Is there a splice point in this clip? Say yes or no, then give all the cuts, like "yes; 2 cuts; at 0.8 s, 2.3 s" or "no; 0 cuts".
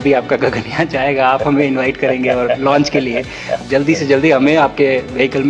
yes; 1 cut; at 3.6 s